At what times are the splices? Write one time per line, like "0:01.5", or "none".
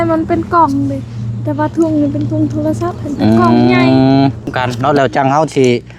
0:04.6

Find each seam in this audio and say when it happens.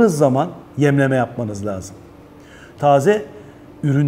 0:02.7

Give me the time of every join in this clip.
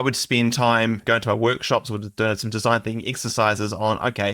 0:01.0

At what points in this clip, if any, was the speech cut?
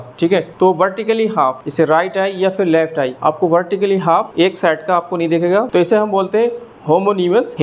0:05.7

